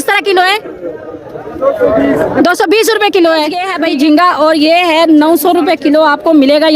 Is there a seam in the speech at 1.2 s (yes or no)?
no